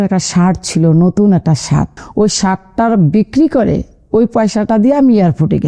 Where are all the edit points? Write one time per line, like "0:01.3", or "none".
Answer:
0:02.0